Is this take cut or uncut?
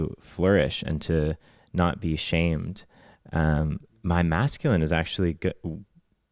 uncut